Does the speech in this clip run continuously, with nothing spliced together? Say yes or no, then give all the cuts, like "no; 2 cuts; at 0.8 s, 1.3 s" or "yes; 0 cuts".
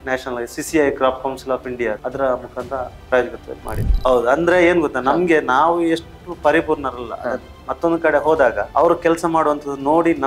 no; 3 cuts; at 2.0 s, 3.9 s, 8.6 s